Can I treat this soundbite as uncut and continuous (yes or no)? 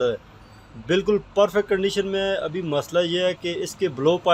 yes